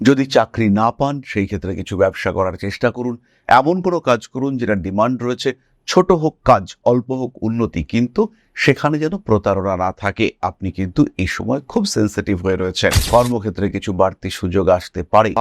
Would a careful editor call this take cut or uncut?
cut